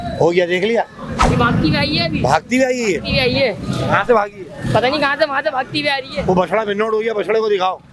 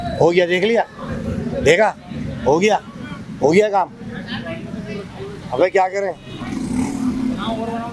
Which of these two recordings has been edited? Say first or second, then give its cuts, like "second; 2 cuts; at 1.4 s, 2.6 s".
first; 1 cut; at 1.1 s